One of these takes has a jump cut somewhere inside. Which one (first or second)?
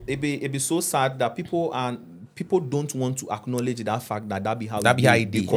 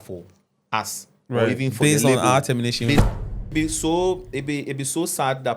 second